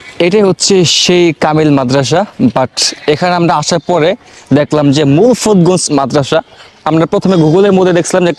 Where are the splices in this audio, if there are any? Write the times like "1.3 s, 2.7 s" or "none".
none